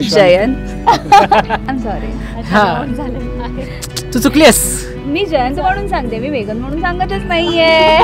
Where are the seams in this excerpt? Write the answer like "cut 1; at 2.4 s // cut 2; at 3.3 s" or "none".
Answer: cut 1; at 1.6 s